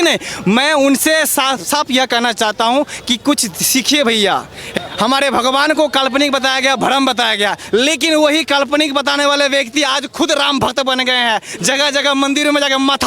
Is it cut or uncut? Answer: cut